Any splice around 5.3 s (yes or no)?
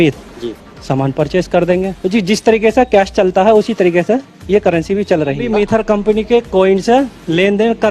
yes